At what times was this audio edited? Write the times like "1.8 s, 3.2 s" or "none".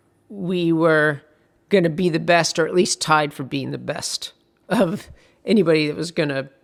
none